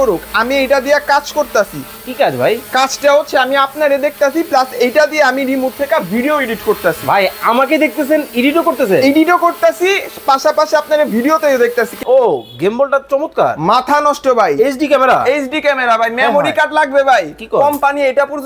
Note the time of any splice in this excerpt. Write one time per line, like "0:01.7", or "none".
0:12.0